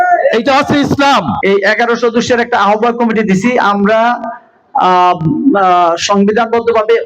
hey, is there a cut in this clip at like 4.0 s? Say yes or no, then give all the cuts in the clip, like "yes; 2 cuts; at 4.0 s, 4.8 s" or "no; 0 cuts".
no; 1 cut; at 1.3 s